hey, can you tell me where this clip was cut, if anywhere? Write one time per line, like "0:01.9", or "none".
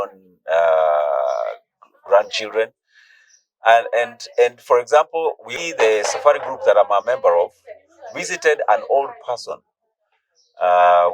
0:05.6